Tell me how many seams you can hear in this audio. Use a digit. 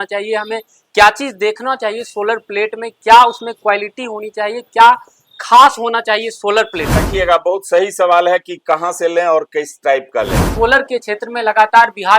2